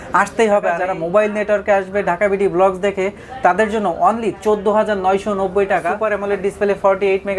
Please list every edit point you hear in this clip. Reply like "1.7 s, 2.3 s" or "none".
0.9 s, 6.0 s